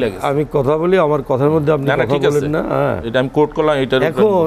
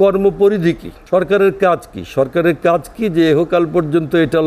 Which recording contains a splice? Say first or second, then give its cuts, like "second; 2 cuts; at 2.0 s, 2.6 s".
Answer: second; 1 cut; at 0.9 s